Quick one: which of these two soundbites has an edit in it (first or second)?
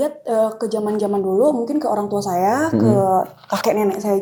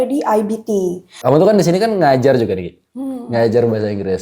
second